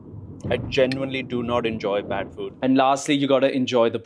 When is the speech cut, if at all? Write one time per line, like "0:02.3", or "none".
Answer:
0:02.5